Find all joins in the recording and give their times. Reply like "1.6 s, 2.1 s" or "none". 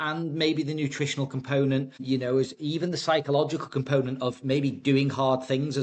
2.0 s